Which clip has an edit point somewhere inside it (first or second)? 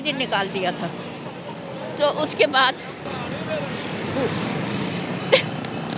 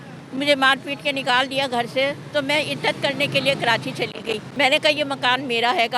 second